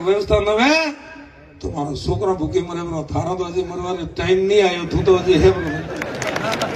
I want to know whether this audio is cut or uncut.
uncut